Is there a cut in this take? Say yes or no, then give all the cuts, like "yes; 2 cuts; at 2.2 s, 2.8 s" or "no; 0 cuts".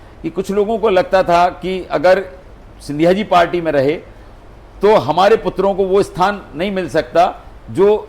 no; 0 cuts